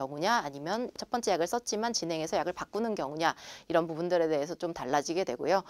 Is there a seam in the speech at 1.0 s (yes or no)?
yes